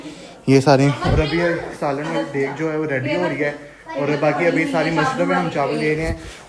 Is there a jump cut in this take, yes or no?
no